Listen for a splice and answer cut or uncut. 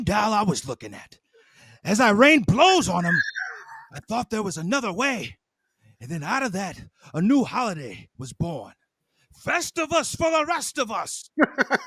uncut